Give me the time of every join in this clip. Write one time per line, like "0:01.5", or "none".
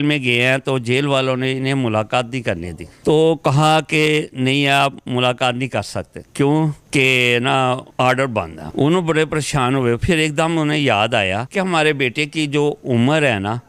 none